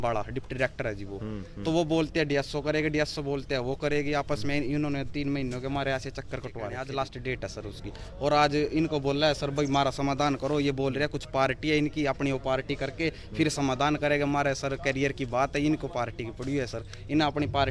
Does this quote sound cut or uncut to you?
cut